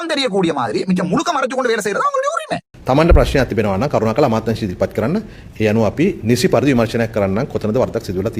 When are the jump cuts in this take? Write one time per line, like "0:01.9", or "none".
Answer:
0:02.7